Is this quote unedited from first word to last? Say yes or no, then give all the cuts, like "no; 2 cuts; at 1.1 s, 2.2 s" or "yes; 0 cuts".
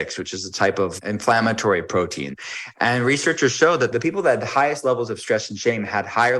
no; 3 cuts; at 0.9 s, 2.3 s, 3.9 s